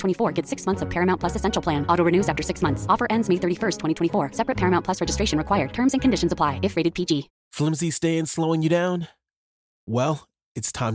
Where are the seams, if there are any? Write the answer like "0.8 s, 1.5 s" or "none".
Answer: 7.4 s

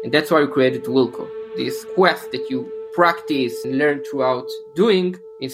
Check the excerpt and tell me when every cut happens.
1.8 s, 3.6 s

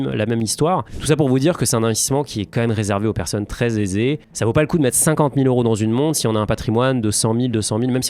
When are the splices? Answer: 0.9 s

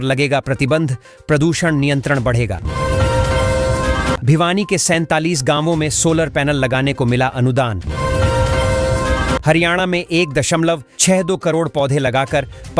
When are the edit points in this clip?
none

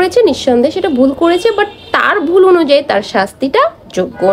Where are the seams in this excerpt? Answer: none

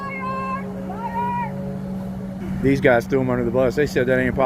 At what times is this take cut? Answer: 2.4 s

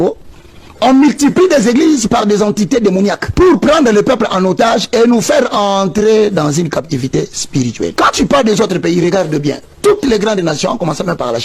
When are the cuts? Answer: 3.2 s, 7.9 s

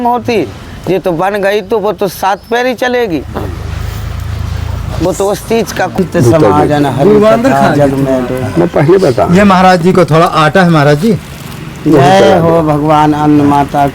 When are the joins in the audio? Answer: 6.0 s

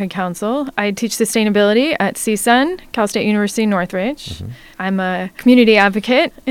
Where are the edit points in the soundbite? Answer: none

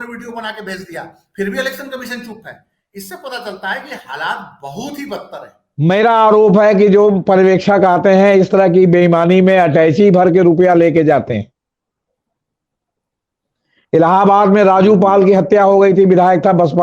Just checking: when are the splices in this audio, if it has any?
5.6 s

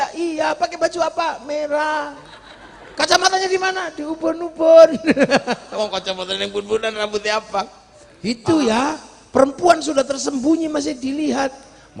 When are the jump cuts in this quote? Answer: 8.3 s

